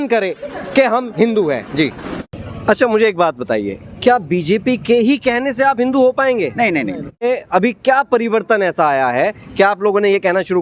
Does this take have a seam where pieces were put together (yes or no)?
yes